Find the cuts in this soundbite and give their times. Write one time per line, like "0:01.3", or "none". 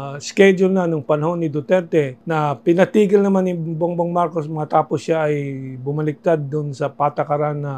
0:02.2